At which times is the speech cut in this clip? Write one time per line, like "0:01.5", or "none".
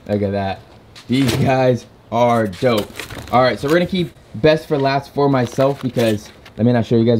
none